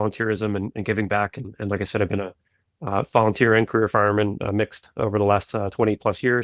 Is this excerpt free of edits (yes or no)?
yes